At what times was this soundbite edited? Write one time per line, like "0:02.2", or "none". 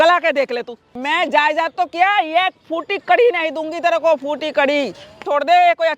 0:01.0
0:05.2